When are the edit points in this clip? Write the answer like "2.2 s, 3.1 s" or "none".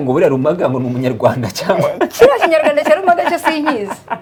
none